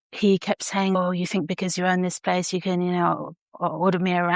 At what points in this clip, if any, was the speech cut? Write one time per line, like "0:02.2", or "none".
0:01.0